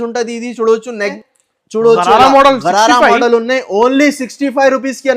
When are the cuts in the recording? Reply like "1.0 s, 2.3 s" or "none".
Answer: 1.1 s